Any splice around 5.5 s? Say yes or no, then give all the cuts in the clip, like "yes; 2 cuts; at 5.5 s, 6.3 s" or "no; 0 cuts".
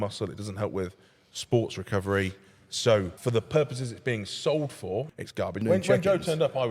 yes; 2 cuts; at 3.1 s, 5.5 s